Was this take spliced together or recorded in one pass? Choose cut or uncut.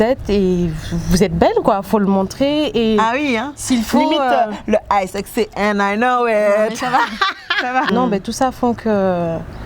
cut